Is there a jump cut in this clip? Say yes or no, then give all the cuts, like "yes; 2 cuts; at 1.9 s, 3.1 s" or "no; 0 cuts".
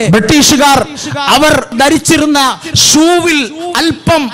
yes; 1 cut; at 1.7 s